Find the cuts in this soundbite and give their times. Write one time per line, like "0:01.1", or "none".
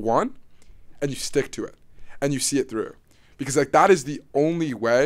none